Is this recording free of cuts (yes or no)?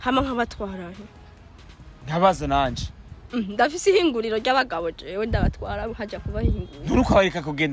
yes